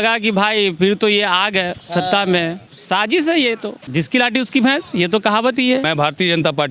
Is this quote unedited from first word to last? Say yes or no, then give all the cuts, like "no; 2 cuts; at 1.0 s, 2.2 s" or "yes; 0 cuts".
no; 3 cuts; at 2.7 s, 3.8 s, 5.9 s